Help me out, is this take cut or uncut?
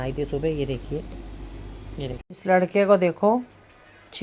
cut